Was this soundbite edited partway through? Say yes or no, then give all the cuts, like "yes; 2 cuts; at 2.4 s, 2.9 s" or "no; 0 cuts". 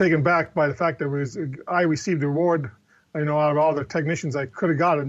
no; 0 cuts